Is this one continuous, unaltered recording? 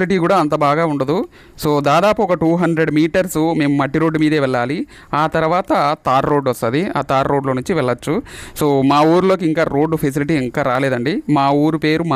yes; 0 cuts

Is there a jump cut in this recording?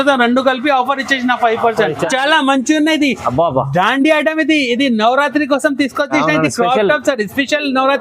yes; 1 cut; at 2.0 s

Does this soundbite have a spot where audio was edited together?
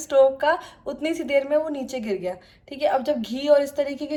no; 0 cuts

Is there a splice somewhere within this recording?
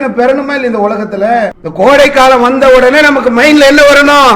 yes; 1 cut; at 1.6 s

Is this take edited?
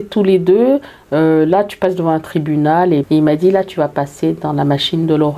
yes; 1 cut; at 3.1 s

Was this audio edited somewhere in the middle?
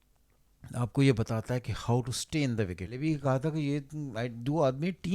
yes; 1 cut; at 2.9 s

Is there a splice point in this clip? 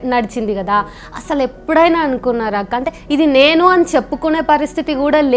no; 0 cuts

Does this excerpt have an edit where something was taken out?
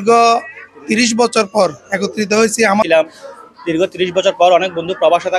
yes; 1 cut; at 2.8 s

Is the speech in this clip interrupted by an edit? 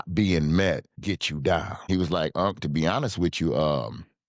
yes; 2 cuts; at 0.9 s, 1.9 s

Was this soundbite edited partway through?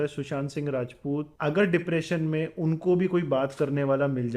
yes; 1 cut; at 1.3 s

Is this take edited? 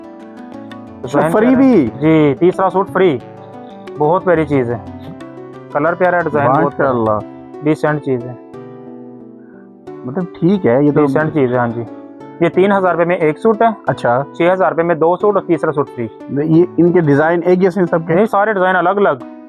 no; 0 cuts

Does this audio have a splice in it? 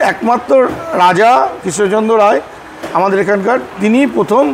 no; 0 cuts

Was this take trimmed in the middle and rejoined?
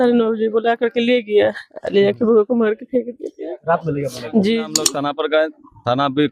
yes; 1 cut; at 4.8 s

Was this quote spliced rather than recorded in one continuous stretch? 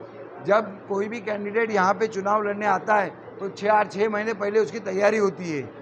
no; 0 cuts

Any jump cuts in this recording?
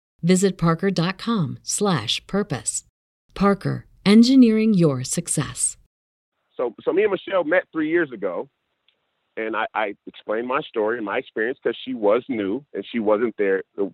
yes; 1 cut; at 6.1 s

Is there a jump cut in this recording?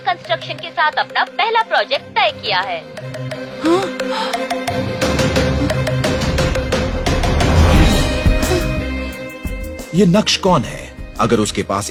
no; 0 cuts

